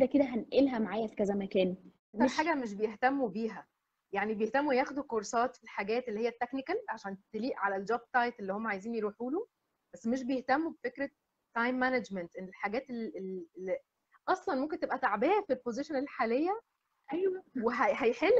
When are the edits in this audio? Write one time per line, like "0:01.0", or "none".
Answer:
0:02.1